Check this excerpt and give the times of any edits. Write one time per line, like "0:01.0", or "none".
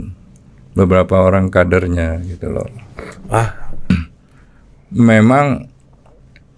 0:03.9